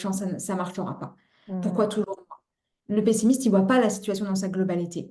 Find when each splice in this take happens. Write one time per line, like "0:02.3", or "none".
none